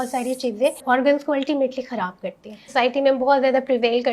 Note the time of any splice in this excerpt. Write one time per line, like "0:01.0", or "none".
0:00.8
0:02.7